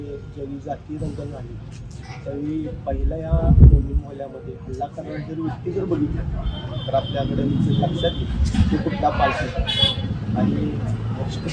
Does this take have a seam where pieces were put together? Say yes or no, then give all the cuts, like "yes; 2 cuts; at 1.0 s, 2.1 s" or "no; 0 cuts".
no; 0 cuts